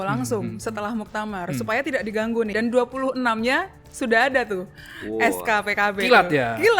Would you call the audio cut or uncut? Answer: cut